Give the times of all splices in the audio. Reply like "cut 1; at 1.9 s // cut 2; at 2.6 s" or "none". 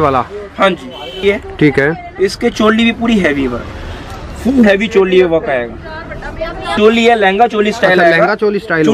cut 1; at 1.2 s // cut 2; at 6.6 s

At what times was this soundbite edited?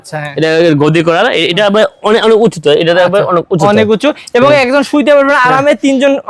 none

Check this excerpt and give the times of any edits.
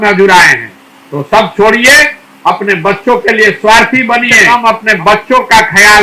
cut 1; at 4.4 s

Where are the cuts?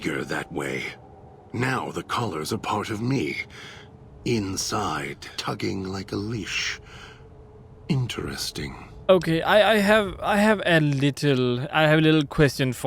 cut 1; at 5.3 s // cut 2; at 8.9 s

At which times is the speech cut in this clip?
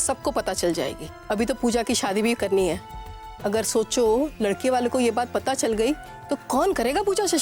cut 1; at 1.1 s

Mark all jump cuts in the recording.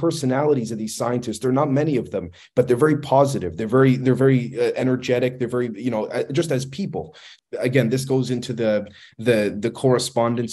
cut 1; at 7.3 s

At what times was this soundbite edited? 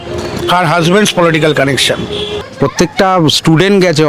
cut 1; at 2.5 s

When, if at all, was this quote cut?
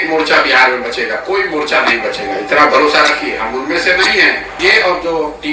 cut 1; at 4.5 s

